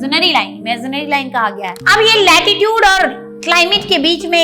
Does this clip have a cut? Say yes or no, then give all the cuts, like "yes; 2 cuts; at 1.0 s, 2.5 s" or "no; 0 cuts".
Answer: yes; 1 cut; at 1.8 s